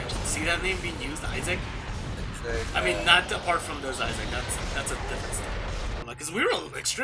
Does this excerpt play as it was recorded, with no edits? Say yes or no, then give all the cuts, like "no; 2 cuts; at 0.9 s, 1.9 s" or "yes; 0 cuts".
no; 1 cut; at 6.0 s